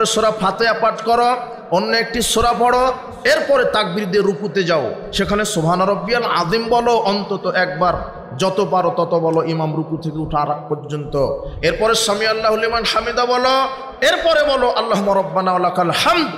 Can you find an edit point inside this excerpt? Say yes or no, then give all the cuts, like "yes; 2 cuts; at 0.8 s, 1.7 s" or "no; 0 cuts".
no; 0 cuts